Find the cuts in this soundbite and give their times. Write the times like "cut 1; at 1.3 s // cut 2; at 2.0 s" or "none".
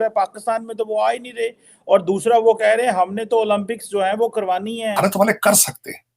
cut 1; at 5.0 s